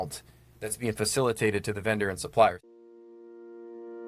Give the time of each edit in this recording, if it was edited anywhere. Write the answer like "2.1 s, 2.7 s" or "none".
2.6 s